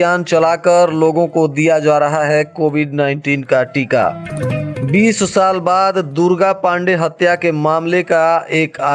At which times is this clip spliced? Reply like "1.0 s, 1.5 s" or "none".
none